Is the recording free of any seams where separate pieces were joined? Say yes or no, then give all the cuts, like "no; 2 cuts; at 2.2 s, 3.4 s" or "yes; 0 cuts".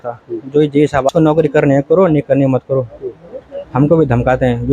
no; 1 cut; at 1.1 s